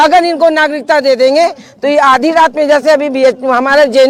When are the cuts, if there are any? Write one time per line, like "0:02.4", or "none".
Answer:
none